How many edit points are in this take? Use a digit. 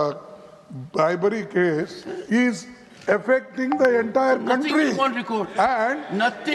0